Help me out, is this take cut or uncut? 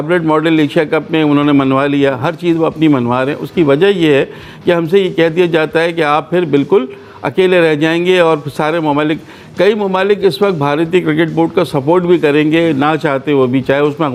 uncut